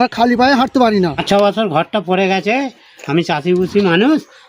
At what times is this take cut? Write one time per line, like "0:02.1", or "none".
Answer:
0:01.2